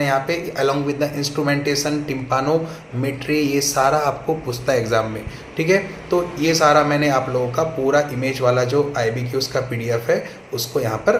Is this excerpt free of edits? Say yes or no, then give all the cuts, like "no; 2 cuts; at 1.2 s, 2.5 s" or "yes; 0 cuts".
yes; 0 cuts